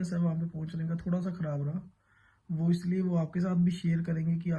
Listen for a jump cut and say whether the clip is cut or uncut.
uncut